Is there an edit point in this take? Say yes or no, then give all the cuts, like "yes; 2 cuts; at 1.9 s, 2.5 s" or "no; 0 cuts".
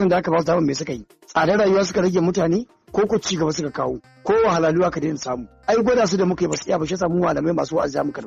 no; 0 cuts